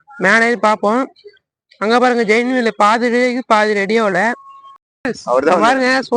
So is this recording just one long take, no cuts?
no; 1 cut; at 5.1 s

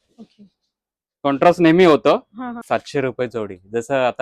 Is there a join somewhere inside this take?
yes; 1 cut; at 2.6 s

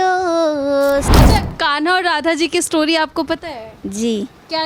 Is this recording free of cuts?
no; 1 cut; at 1.1 s

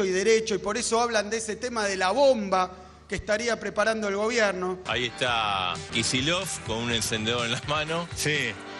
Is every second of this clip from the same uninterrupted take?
no; 1 cut; at 4.8 s

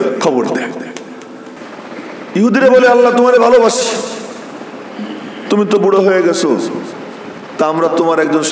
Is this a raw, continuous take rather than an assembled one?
no; 1 cut; at 1.5 s

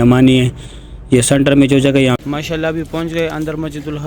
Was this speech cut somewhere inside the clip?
yes; 1 cut; at 2.2 s

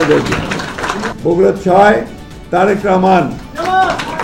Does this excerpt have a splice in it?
yes; 1 cut; at 1.1 s

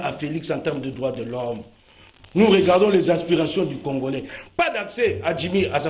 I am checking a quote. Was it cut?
yes; 1 cut; at 4.4 s

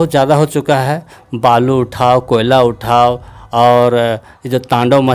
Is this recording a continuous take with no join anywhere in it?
yes; 0 cuts

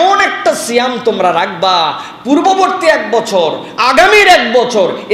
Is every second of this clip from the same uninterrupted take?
yes; 0 cuts

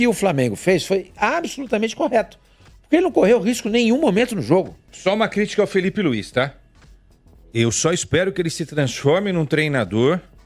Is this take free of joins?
no; 1 cut; at 4.9 s

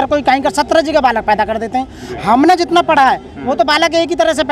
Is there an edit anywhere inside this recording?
no; 0 cuts

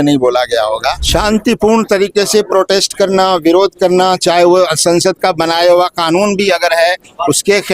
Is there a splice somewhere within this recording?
yes; 1 cut; at 1.0 s

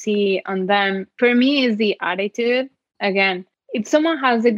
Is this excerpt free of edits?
no; 2 cuts; at 1.1 s, 3.5 s

